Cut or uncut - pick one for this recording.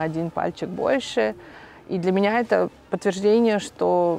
uncut